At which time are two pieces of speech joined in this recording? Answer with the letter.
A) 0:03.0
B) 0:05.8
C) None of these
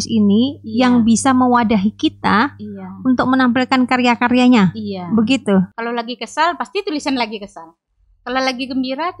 B